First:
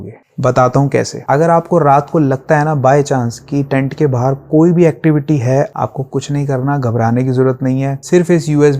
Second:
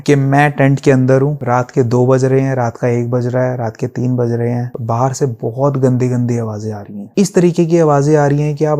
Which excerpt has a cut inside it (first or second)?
first